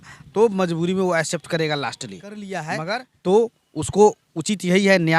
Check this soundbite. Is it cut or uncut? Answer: cut